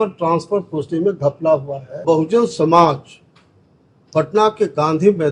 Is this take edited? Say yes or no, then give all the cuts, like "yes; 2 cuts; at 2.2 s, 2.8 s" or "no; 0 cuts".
yes; 1 cut; at 2.0 s